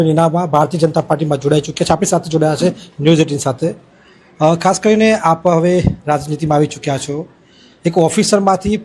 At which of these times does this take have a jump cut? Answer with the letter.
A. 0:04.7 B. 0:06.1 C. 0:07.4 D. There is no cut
B